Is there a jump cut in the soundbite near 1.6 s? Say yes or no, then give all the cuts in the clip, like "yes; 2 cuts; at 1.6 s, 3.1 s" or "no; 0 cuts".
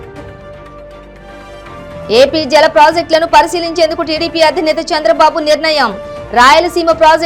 yes; 1 cut; at 1.6 s